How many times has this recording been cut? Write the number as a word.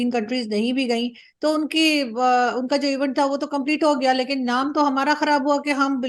zero